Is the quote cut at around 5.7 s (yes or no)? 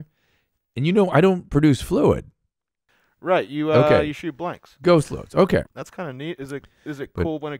yes